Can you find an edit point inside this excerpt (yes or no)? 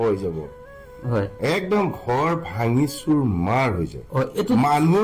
no